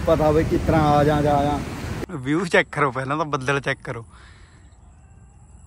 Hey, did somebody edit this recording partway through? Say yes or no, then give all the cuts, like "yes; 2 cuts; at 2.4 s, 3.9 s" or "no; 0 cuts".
yes; 1 cut; at 1.8 s